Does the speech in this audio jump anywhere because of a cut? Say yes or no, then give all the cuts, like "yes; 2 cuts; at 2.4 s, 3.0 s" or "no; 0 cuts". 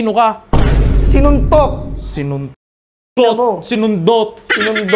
no; 0 cuts